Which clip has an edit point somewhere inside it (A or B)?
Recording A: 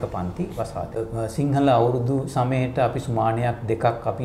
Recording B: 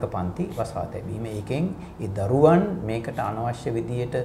A